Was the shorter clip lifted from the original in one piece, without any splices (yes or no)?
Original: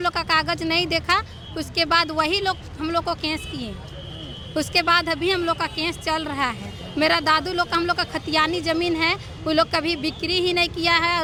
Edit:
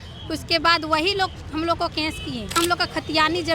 no